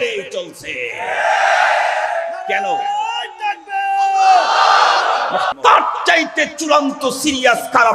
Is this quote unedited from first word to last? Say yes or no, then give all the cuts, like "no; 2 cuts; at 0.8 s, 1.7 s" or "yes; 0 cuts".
no; 1 cut; at 5.5 s